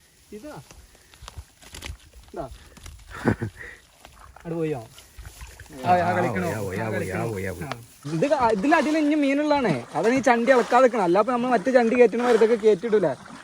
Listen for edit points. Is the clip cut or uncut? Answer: cut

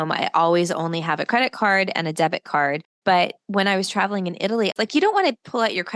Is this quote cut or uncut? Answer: cut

